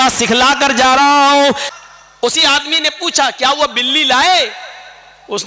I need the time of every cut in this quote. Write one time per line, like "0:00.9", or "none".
0:01.7